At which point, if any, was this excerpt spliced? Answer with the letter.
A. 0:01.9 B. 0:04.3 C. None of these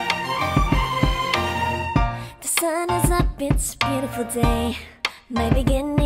A